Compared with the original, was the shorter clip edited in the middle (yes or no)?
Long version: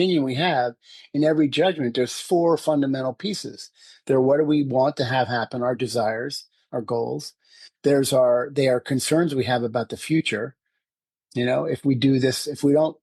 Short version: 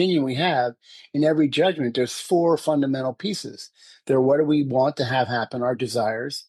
no